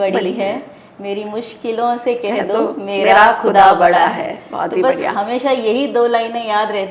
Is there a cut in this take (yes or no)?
no